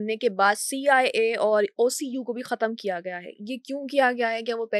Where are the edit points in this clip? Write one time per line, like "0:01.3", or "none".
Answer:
none